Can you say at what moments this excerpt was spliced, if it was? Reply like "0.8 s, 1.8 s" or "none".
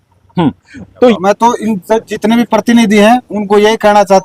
1.1 s